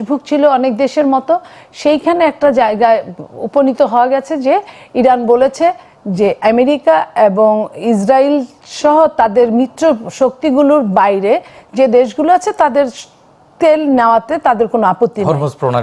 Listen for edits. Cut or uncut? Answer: uncut